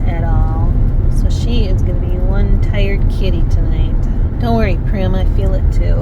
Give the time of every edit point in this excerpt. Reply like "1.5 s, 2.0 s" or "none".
1.0 s, 4.3 s